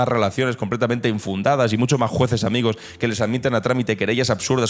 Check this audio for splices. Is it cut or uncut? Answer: uncut